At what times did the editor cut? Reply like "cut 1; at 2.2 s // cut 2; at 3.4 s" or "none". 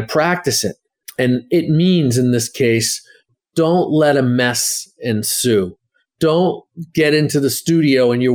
cut 1; at 3.2 s